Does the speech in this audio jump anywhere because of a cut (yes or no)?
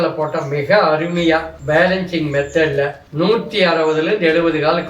yes